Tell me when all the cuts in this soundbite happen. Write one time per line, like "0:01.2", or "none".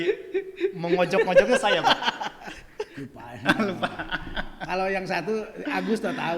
0:02.9